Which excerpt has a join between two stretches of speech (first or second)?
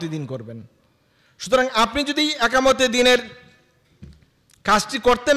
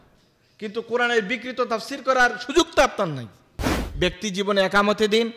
second